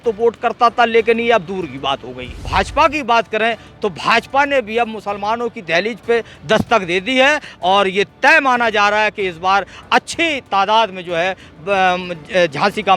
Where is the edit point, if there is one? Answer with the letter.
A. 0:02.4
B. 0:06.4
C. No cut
A